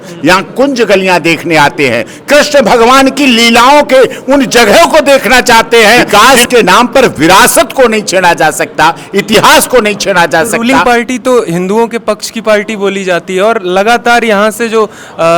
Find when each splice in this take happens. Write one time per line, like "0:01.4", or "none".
0:06.0
0:10.5